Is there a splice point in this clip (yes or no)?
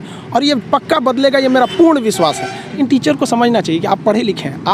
yes